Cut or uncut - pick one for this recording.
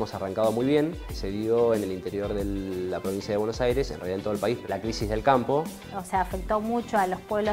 cut